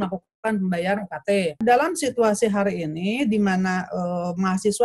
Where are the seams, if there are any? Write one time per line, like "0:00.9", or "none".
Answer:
0:01.6